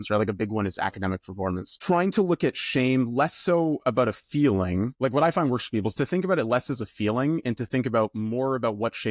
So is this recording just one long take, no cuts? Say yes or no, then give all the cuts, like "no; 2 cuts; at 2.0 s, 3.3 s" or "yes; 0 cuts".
no; 1 cut; at 1.7 s